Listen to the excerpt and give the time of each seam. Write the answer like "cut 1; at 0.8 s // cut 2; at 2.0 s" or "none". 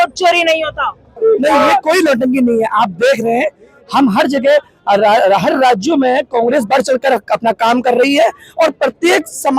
cut 1; at 1.2 s